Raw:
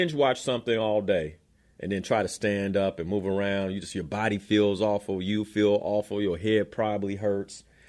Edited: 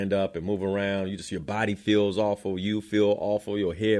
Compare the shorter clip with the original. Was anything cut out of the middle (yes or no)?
no